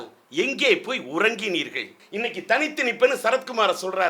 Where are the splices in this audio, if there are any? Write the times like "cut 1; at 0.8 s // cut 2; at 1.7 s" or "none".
cut 1; at 2.0 s